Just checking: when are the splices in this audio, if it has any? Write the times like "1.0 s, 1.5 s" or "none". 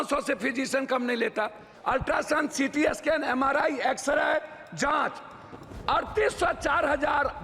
1.7 s